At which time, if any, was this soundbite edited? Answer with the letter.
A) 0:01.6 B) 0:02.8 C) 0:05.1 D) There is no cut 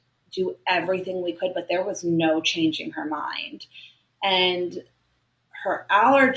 D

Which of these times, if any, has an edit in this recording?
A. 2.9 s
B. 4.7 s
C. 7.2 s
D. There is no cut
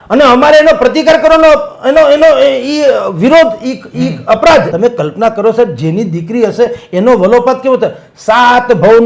B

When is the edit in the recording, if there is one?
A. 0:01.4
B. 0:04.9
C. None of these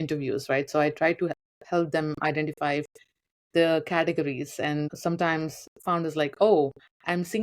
B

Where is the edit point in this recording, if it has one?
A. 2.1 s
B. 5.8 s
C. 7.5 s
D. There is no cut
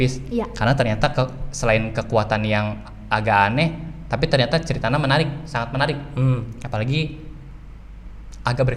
D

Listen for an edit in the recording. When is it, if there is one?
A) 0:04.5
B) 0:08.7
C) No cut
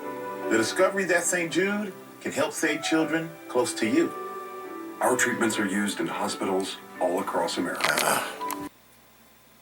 B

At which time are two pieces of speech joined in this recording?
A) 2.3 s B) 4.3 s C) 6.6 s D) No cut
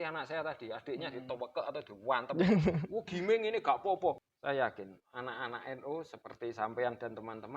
B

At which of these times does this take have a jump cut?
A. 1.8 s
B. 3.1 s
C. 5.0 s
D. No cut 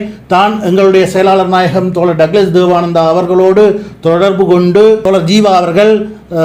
C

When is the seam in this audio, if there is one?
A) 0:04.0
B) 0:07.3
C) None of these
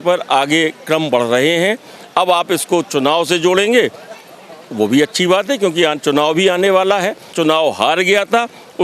B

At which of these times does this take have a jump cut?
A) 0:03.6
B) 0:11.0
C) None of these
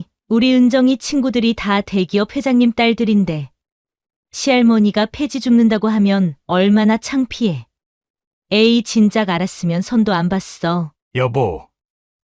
B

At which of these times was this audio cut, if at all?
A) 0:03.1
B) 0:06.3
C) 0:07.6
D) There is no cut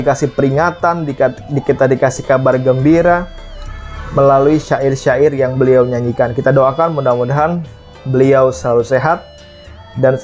D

